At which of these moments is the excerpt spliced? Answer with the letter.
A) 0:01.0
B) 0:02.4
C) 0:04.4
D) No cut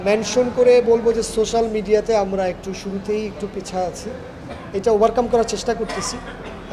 D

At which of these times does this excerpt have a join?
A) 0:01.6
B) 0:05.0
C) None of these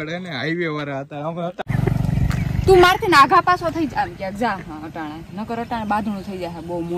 A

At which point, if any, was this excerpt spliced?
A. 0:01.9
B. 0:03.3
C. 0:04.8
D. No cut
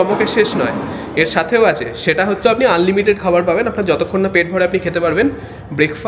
A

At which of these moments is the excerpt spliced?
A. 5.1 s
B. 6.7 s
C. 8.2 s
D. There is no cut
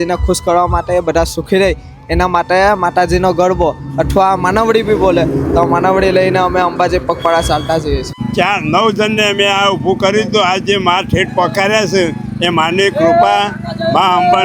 C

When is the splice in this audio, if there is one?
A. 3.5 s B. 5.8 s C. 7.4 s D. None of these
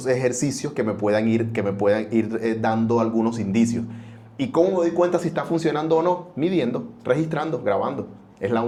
D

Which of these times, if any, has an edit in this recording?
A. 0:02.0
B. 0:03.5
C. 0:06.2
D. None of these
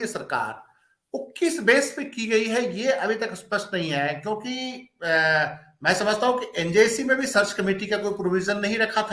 D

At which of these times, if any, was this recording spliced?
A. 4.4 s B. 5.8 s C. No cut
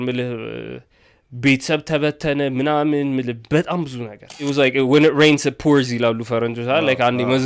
A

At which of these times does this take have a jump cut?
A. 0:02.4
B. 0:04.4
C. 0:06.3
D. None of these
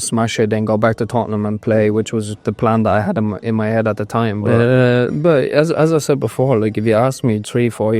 B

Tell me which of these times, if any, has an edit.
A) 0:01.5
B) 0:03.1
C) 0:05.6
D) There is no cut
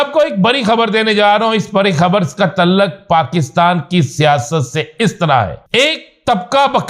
C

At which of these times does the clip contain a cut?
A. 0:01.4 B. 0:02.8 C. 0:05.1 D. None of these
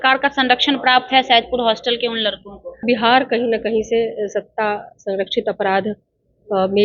B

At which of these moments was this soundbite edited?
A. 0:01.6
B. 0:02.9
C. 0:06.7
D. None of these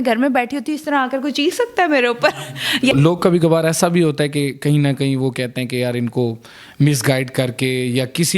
B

